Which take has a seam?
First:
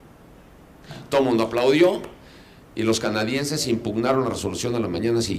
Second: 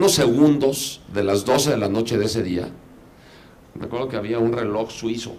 first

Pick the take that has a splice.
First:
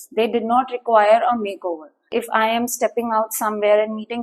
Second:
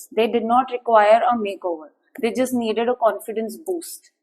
first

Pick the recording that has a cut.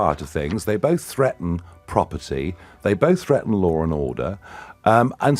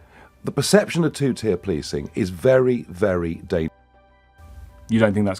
second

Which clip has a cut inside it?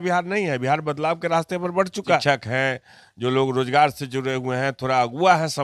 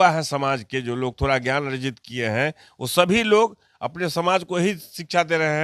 first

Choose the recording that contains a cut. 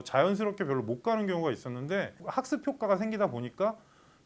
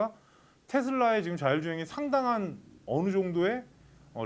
first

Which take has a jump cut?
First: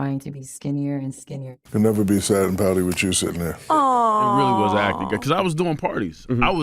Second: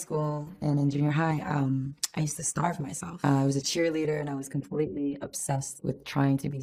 first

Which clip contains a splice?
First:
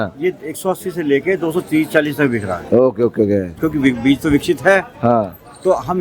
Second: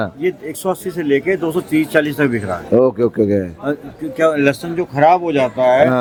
first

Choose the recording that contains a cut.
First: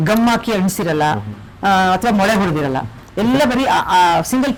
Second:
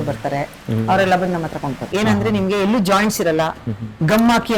second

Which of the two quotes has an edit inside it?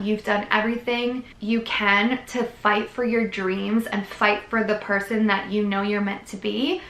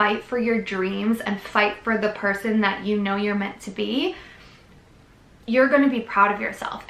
first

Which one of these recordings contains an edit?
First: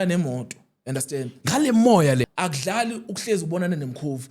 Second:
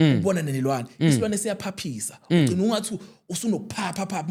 first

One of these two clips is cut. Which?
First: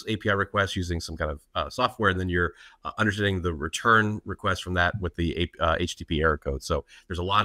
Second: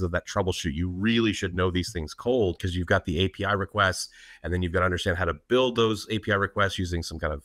second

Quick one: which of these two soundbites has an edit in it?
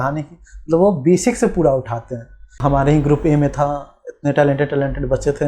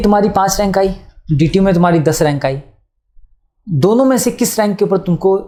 first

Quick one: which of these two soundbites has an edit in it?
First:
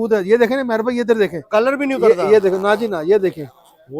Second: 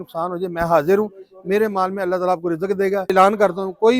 second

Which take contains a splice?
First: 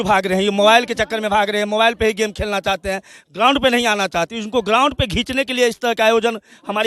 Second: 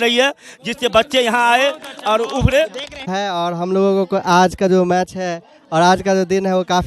second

